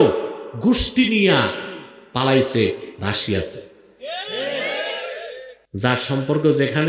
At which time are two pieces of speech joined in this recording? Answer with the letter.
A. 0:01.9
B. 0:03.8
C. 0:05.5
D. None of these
C